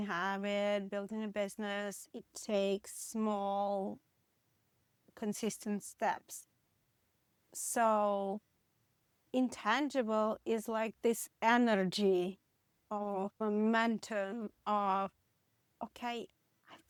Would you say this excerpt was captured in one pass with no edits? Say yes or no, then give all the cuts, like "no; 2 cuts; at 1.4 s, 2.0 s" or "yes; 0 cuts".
yes; 0 cuts